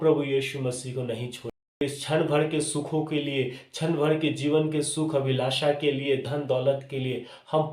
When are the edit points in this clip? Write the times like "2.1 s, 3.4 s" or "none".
1.8 s